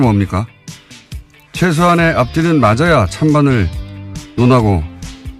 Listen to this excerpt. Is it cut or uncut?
cut